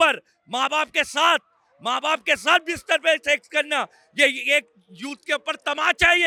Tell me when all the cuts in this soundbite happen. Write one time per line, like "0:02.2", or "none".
none